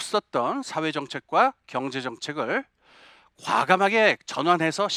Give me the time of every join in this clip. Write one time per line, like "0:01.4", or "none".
none